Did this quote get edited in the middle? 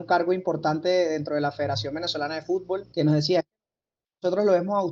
yes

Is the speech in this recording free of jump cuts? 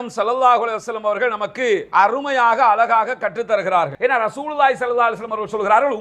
no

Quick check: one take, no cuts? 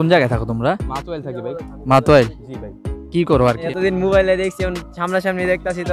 no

